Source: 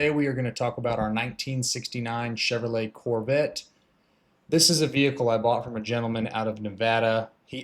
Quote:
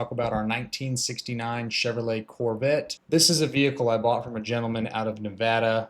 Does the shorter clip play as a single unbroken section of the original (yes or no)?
no